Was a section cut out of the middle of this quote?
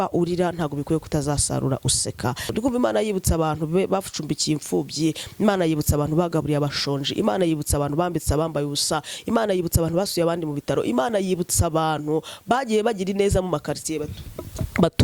yes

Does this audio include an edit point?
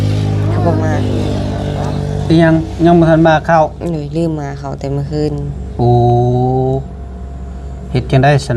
no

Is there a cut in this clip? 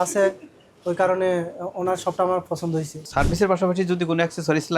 yes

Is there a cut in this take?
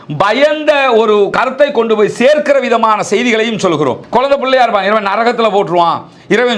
yes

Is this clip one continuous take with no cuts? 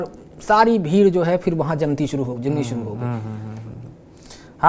yes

